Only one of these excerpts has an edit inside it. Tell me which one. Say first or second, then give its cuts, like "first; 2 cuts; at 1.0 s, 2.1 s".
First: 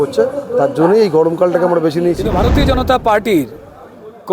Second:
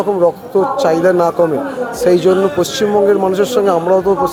first; 1 cut; at 2.3 s